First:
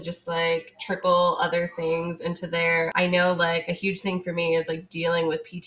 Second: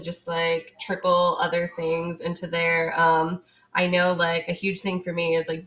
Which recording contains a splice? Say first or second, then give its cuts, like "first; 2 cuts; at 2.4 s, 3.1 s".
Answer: first; 1 cut; at 2.9 s